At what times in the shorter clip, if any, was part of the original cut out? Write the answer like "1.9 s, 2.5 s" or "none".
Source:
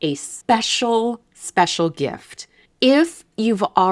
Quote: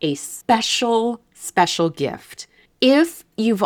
none